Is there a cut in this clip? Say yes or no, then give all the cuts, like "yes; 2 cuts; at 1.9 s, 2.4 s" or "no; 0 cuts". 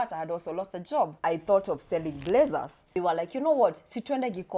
yes; 2 cuts; at 1.2 s, 2.8 s